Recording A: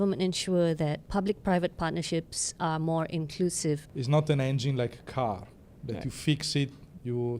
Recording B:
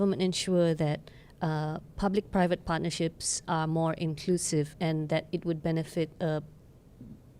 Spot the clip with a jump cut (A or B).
A